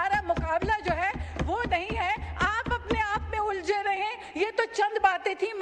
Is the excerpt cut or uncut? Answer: uncut